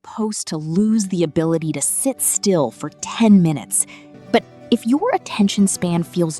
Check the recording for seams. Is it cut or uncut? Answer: cut